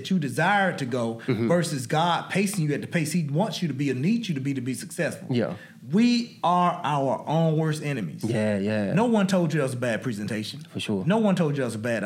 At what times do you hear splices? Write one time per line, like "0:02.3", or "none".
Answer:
none